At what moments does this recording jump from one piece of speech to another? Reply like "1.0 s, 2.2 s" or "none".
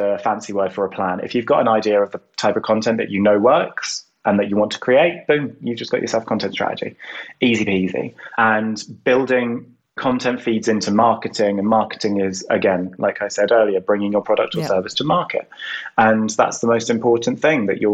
none

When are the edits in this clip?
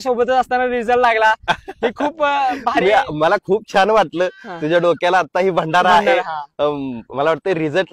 none

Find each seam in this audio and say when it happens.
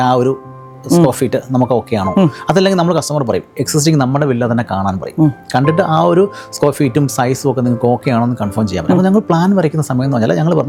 none

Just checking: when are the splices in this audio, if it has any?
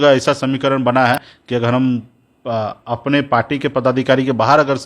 1.2 s

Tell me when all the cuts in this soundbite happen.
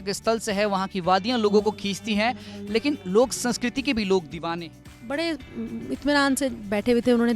4.7 s

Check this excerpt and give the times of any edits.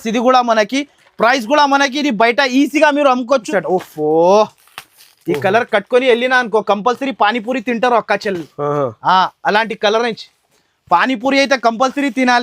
3.5 s

